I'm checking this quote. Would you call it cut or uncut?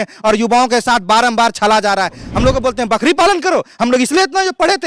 cut